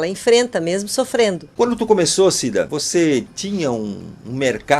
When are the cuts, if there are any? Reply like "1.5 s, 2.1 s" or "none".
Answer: 1.4 s, 2.8 s